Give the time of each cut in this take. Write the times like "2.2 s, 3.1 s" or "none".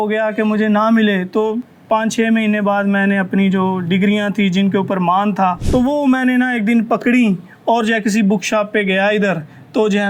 5.6 s